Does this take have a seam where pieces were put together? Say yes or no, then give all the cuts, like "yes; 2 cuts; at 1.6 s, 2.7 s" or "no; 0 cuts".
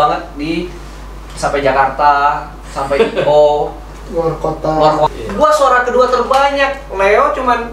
yes; 1 cut; at 5.1 s